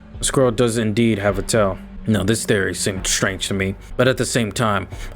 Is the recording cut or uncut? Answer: cut